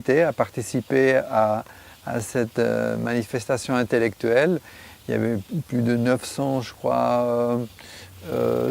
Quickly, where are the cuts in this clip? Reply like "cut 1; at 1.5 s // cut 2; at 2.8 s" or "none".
cut 1; at 1.4 s